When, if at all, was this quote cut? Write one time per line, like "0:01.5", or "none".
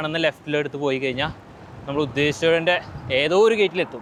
none